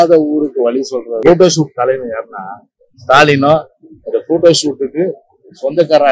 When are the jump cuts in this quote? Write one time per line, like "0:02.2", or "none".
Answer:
0:01.1